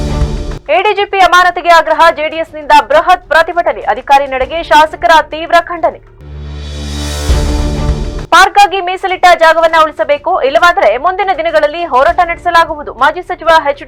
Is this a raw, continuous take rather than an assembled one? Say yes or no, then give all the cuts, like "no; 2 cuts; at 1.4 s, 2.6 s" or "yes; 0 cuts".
yes; 0 cuts